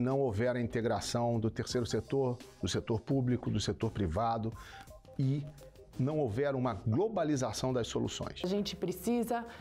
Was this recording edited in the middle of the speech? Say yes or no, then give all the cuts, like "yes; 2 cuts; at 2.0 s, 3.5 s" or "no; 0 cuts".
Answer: yes; 1 cut; at 8.5 s